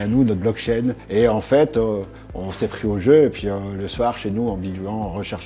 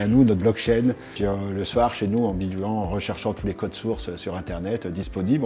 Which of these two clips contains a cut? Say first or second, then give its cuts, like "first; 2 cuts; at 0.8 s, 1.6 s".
second; 1 cut; at 1.1 s